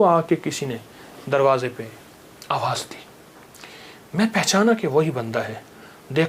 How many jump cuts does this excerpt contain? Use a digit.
0